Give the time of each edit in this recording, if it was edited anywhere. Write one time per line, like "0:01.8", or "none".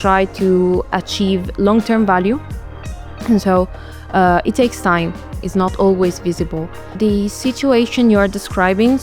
0:07.0